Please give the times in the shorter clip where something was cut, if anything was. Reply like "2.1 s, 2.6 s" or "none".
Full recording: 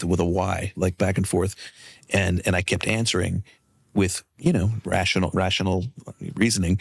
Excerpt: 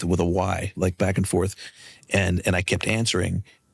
none